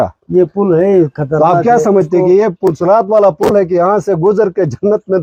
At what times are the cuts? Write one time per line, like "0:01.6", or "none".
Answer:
none